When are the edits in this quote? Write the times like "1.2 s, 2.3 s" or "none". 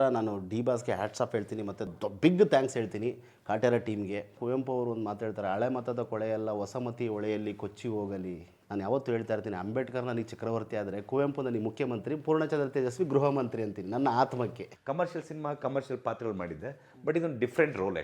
1.9 s, 4.3 s, 8.6 s, 14.7 s